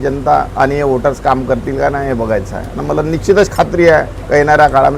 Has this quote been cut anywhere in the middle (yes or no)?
no